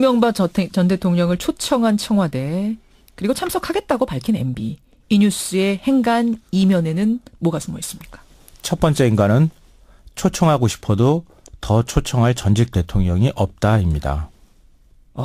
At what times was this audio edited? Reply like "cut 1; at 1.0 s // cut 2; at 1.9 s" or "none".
none